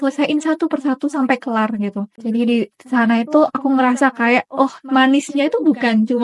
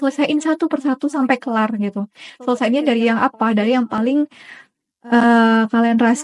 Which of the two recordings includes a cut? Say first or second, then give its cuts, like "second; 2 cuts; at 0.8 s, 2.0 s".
first; 1 cut; at 2.1 s